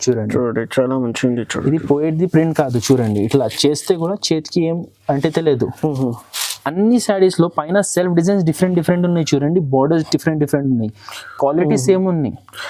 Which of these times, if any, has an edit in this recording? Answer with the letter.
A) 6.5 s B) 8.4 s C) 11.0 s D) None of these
A